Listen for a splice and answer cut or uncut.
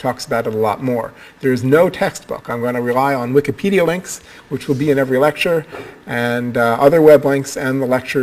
cut